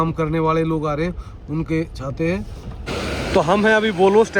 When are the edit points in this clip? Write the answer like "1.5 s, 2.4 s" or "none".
2.8 s